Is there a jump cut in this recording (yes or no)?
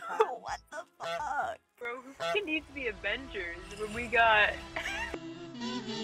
yes